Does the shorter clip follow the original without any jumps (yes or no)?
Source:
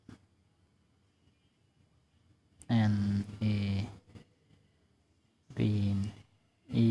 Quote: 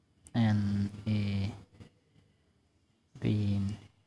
yes